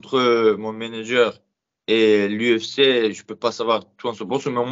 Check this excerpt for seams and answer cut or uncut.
uncut